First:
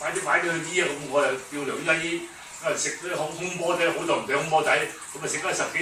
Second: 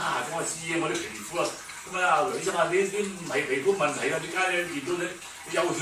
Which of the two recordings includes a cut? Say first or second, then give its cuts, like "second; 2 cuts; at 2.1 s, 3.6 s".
second; 1 cut; at 4.0 s